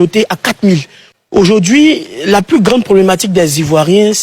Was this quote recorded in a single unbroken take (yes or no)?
no